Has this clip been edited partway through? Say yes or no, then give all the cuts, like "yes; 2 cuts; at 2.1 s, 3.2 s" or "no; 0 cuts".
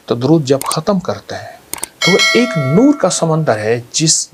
no; 0 cuts